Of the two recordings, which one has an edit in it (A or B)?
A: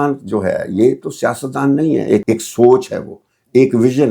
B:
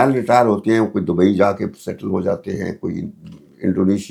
A